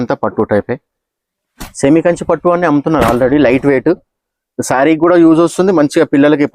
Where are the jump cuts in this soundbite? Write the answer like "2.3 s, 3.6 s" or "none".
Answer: none